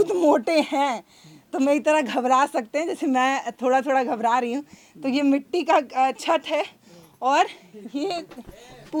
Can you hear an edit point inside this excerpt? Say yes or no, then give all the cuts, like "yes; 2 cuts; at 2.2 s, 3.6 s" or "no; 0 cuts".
no; 0 cuts